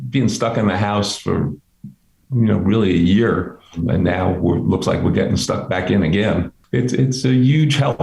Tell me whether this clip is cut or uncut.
cut